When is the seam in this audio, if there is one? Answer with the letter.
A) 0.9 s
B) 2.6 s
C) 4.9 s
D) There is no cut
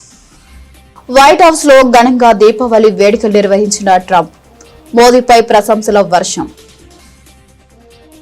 A